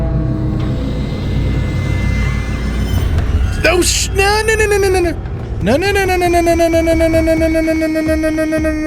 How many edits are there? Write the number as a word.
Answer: zero